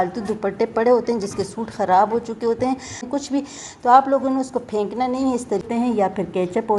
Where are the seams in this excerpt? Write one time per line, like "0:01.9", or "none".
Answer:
0:03.0
0:05.6

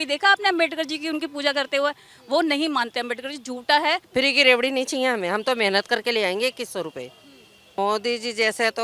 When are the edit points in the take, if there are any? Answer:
0:04.1
0:07.7

